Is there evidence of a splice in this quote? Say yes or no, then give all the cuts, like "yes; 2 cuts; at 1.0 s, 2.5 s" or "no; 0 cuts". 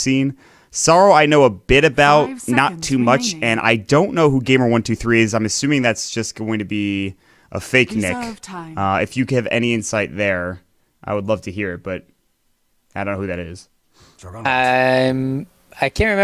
yes; 1 cut; at 11.0 s